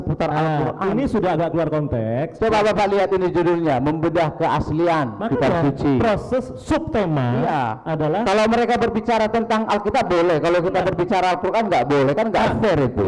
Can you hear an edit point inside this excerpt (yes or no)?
no